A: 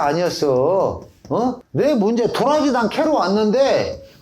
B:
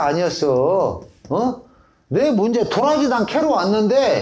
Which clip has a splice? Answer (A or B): A